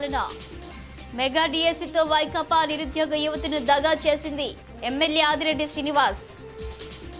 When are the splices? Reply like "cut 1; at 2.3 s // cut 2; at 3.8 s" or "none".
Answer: cut 1; at 6.2 s

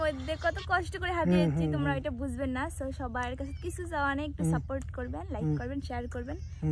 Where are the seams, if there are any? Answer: none

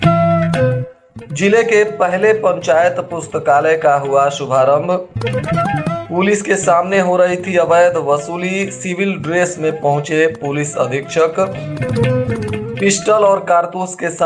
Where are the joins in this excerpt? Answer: cut 1; at 0.9 s

